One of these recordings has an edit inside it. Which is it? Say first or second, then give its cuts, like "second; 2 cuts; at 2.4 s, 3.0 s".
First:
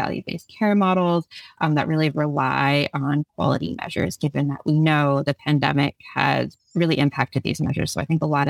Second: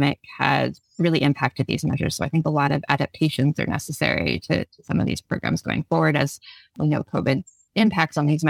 second; 1 cut; at 6.7 s